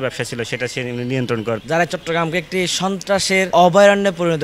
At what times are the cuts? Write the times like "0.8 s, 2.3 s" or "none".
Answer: 1.6 s